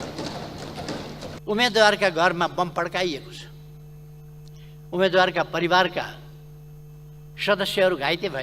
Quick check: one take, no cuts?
no; 1 cut; at 1.4 s

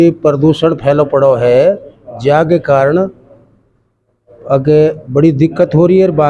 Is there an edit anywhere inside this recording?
no; 0 cuts

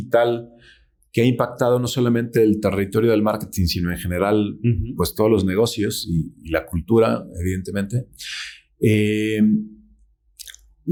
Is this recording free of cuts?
yes; 0 cuts

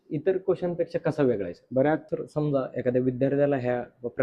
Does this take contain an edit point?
yes; 1 cut; at 2.0 s

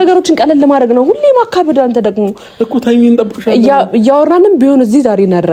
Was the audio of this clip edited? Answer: no; 0 cuts

